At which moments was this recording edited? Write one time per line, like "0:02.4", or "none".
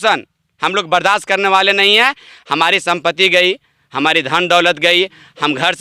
none